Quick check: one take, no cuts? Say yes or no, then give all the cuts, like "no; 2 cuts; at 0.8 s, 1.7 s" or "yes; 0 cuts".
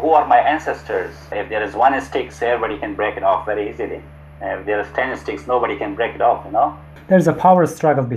no; 2 cuts; at 1.4 s, 6.9 s